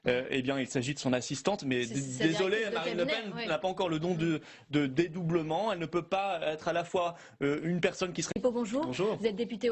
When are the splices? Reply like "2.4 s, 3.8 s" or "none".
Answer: none